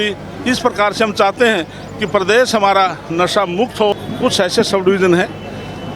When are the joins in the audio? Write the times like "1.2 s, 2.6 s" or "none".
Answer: 4.0 s